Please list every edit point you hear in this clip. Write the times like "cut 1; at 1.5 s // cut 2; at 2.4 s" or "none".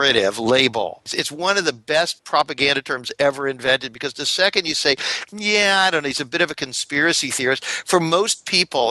cut 1; at 1.2 s // cut 2; at 2.2 s